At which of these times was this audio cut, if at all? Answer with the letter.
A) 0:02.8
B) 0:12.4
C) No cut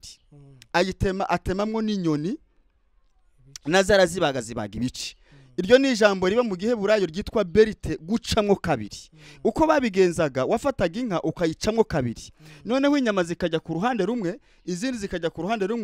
C